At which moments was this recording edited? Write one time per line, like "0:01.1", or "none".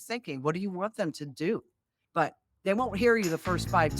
0:01.9

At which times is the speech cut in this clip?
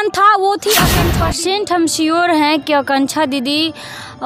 0:01.1

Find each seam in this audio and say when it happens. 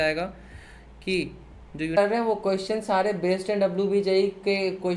0:02.0

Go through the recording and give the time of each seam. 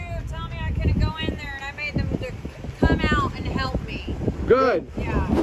none

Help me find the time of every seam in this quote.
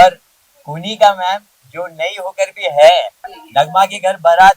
0:03.3

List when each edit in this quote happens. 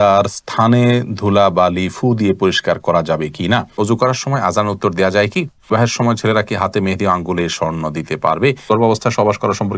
0:03.7
0:05.7
0:08.7

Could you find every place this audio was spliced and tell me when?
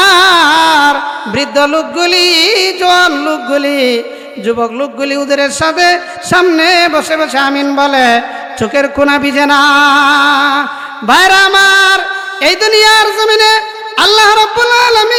none

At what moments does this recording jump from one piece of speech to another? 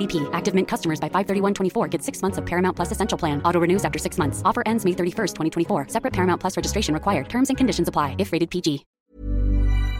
0:08.9

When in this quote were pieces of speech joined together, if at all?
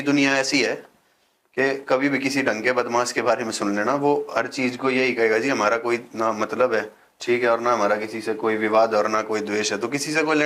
none

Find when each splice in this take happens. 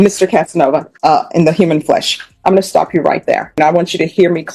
0:00.9
0:03.6

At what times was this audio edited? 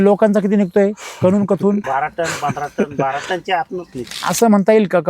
0:01.8
0:04.3

